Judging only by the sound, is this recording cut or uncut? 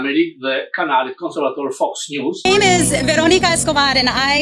cut